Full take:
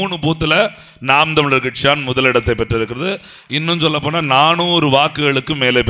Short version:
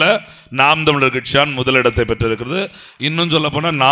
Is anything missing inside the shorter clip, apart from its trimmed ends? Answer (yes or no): no